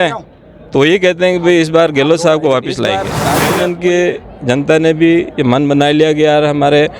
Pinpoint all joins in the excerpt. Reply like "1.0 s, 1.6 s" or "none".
3.2 s